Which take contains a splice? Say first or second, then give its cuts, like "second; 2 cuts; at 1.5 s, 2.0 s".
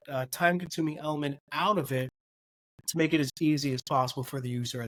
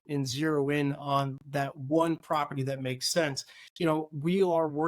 second; 1 cut; at 3.7 s